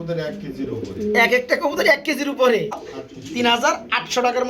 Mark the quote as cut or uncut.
cut